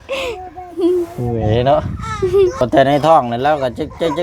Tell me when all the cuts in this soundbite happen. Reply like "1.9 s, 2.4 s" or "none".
2.6 s